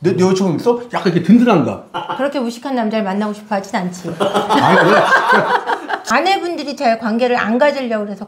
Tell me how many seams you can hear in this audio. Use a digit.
1